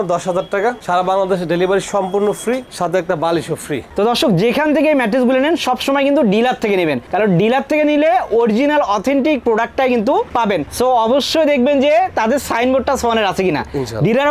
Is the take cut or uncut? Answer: uncut